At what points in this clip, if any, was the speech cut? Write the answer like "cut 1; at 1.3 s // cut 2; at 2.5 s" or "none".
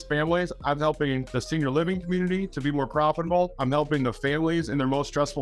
cut 1; at 1.3 s // cut 2; at 3.5 s